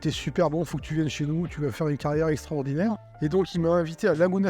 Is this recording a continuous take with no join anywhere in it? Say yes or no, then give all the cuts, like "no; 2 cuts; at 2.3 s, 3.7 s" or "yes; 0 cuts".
yes; 0 cuts